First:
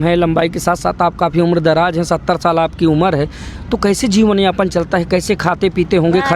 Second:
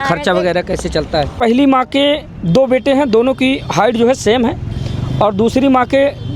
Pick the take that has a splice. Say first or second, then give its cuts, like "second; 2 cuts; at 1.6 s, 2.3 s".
second; 1 cut; at 1.4 s